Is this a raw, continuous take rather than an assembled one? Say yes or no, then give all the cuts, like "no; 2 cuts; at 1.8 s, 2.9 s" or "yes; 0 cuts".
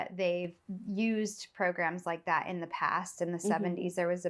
yes; 0 cuts